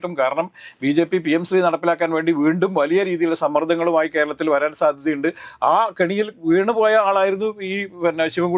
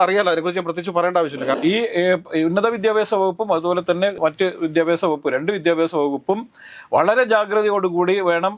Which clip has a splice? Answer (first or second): second